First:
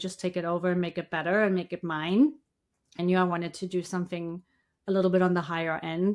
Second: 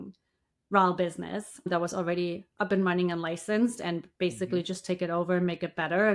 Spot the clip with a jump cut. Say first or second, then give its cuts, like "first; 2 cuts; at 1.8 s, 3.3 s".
first; 1 cut; at 3.0 s